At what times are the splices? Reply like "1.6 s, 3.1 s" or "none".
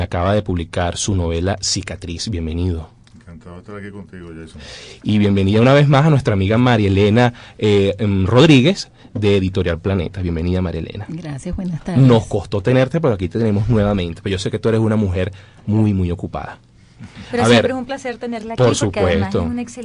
none